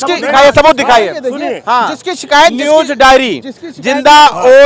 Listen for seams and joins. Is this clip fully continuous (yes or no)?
yes